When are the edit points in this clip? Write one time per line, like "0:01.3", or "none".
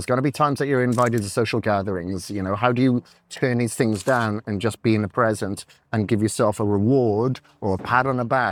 none